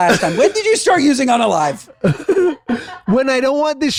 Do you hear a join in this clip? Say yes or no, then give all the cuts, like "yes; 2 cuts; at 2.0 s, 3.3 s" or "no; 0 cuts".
no; 0 cuts